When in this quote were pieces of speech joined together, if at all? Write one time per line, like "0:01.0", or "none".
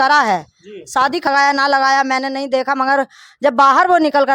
0:01.3